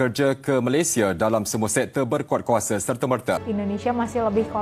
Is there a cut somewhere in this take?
yes; 1 cut; at 3.4 s

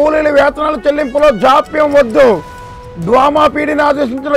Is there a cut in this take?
no; 0 cuts

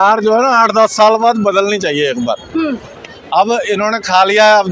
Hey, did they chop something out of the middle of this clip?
no; 0 cuts

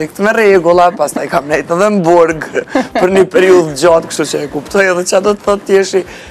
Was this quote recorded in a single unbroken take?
yes; 0 cuts

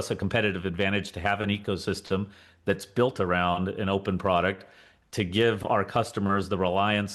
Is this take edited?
no; 0 cuts

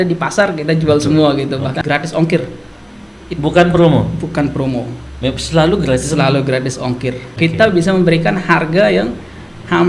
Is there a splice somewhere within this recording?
yes; 2 cuts; at 1.8 s, 7.3 s

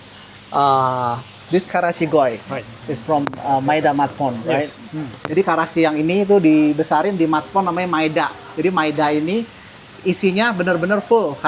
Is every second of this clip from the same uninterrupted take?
yes; 0 cuts

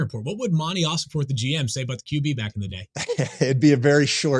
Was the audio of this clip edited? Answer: no; 0 cuts

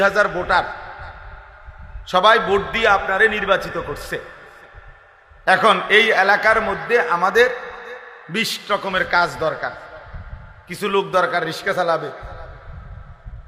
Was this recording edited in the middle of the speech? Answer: no; 0 cuts

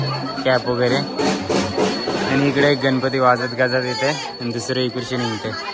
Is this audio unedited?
yes; 0 cuts

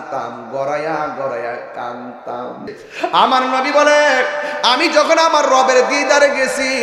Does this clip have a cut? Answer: yes; 1 cut; at 2.8 s

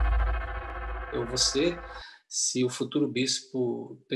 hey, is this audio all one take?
no; 1 cut; at 1.0 s

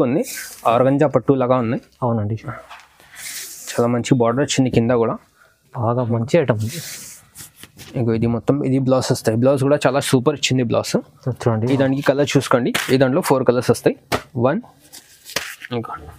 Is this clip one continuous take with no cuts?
yes; 0 cuts

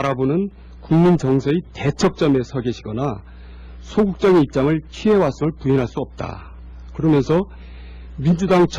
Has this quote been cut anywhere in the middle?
yes; 1 cut; at 7.1 s

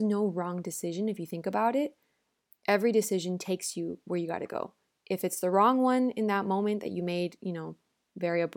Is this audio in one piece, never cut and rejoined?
yes; 0 cuts

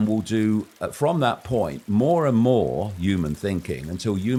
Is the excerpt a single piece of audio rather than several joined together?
yes; 0 cuts

